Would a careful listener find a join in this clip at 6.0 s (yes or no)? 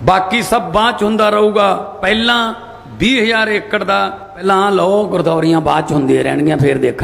no